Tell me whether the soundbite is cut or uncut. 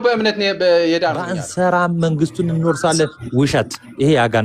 cut